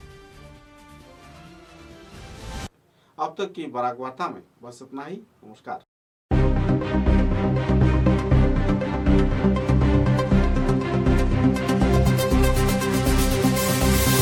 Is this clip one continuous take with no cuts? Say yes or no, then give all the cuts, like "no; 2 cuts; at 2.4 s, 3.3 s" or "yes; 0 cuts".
yes; 0 cuts